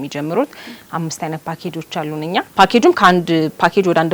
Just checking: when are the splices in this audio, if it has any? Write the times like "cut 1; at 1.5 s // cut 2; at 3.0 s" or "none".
cut 1; at 2.5 s